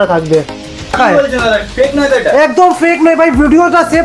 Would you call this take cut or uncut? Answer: cut